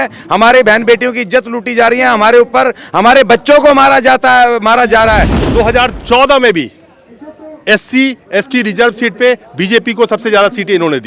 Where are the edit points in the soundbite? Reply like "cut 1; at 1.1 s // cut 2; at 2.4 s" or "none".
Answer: cut 1; at 5.4 s